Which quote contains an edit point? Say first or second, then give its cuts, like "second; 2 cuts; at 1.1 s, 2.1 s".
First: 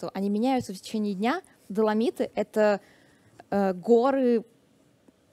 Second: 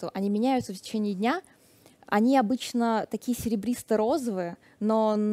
first; 1 cut; at 1.6 s